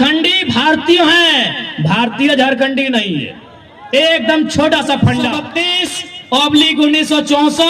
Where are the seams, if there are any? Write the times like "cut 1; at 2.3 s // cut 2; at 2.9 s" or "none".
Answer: cut 1; at 5.4 s